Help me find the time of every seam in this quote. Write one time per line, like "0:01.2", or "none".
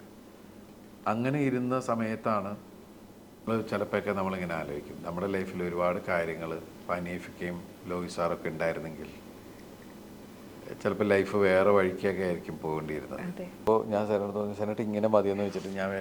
0:03.5
0:13.6